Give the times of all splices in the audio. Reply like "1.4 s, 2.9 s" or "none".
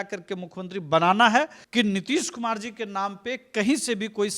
1.6 s